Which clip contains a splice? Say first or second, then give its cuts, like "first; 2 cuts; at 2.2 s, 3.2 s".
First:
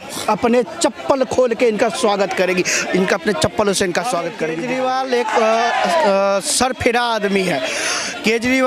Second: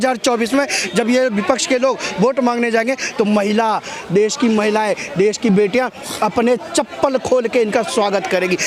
first; 1 cut; at 4.5 s